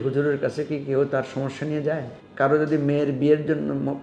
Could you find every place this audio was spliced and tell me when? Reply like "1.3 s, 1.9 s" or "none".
2.2 s